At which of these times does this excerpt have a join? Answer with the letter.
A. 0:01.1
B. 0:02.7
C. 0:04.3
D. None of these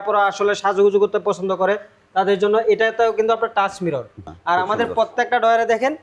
C